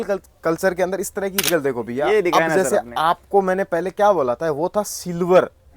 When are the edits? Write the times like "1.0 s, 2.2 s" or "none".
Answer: 1.4 s